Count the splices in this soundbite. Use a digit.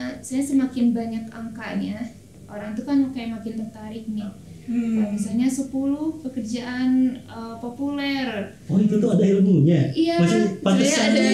0